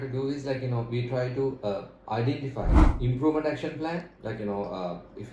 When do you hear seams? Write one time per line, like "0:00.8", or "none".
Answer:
0:02.9